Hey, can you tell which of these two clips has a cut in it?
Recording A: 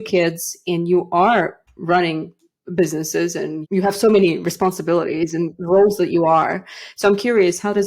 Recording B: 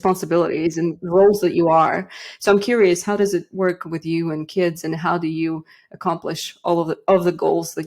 A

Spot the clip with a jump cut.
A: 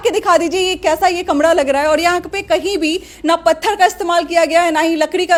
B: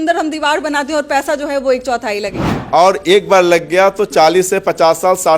B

